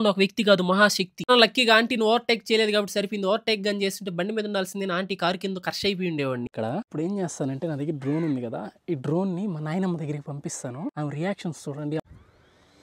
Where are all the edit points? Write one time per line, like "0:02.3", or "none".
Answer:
0:01.3
0:06.5
0:12.0